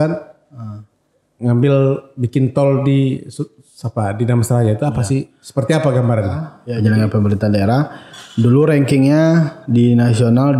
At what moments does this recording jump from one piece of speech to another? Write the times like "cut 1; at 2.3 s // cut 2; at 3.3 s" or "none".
cut 1; at 6.6 s